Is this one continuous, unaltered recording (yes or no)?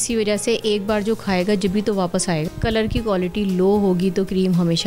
no